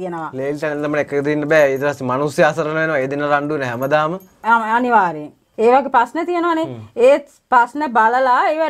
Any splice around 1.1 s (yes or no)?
no